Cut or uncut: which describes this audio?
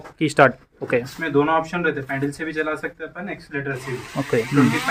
uncut